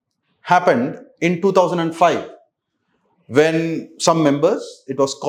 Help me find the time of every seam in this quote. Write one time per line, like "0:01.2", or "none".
none